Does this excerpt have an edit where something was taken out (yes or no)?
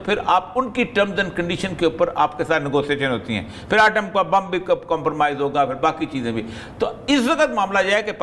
no